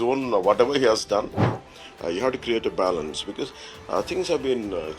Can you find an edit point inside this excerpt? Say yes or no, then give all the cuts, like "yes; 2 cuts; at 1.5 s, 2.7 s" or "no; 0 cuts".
yes; 1 cut; at 1.5 s